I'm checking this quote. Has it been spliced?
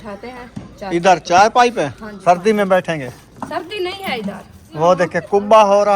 yes; 2 cuts; at 2.1 s, 4.6 s

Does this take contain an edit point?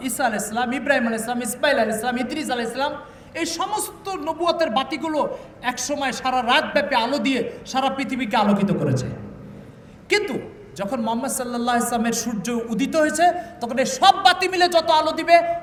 no; 0 cuts

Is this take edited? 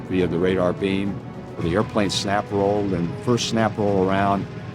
yes; 1 cut; at 1.6 s

